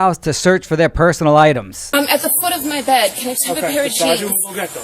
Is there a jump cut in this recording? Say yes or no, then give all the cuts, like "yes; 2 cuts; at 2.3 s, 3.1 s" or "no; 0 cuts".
no; 0 cuts